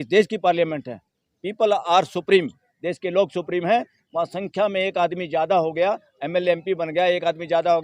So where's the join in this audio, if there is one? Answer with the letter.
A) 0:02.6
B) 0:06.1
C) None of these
C